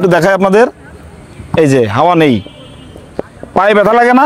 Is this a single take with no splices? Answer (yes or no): yes